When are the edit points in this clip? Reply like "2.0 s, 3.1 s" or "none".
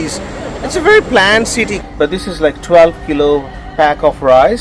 1.8 s

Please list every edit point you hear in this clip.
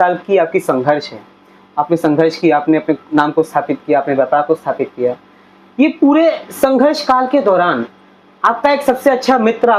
none

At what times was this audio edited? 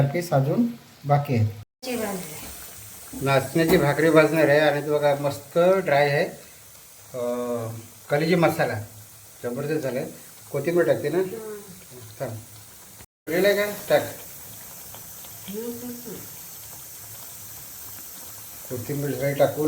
1.6 s

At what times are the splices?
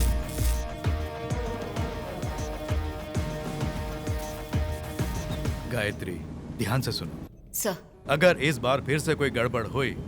5.6 s

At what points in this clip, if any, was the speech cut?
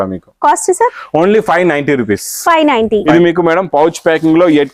3.1 s

